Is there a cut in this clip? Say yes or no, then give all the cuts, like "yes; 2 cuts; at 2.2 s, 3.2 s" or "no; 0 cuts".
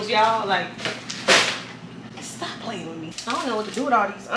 yes; 1 cut; at 3.2 s